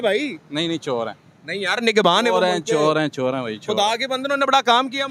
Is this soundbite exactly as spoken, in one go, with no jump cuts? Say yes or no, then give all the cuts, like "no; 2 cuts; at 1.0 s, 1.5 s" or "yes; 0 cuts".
yes; 0 cuts